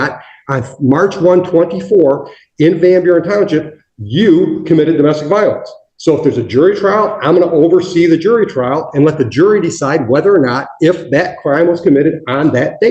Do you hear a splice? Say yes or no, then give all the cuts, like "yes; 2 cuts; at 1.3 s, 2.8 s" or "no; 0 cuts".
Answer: no; 0 cuts